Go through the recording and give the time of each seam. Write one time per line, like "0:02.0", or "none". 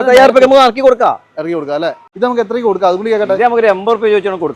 0:02.1